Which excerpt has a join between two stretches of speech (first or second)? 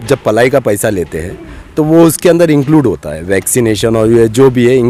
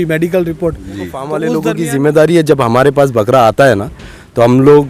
second